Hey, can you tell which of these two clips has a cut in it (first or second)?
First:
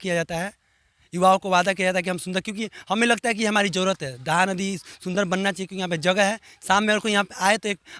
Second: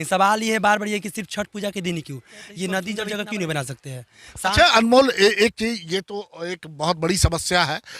second